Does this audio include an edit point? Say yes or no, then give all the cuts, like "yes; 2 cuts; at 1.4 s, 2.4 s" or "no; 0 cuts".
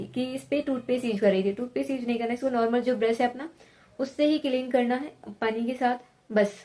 no; 0 cuts